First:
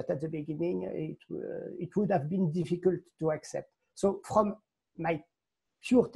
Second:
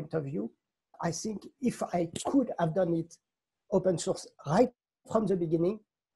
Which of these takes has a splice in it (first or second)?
second